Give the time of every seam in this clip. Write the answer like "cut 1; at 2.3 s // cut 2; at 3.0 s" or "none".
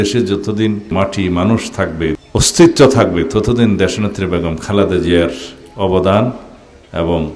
cut 1; at 0.9 s // cut 2; at 2.2 s